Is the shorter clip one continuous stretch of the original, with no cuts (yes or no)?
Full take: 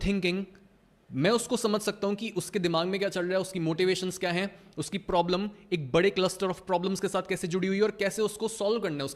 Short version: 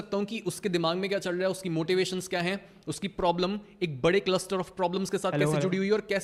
yes